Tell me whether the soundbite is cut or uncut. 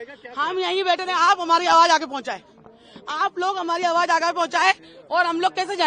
uncut